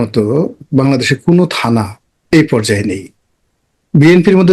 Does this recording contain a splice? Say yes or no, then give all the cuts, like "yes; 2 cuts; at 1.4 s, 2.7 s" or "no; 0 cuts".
no; 0 cuts